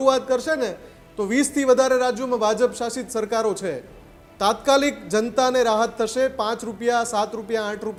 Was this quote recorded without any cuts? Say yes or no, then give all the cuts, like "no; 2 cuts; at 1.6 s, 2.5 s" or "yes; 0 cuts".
yes; 0 cuts